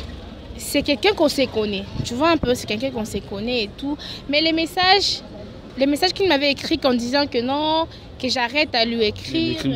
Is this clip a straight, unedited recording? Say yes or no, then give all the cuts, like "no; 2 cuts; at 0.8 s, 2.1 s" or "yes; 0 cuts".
yes; 0 cuts